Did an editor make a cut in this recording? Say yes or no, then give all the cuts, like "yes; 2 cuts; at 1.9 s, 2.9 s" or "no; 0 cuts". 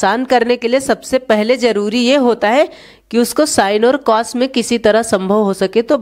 no; 0 cuts